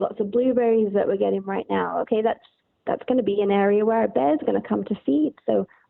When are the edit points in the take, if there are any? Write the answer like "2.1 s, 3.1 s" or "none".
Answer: none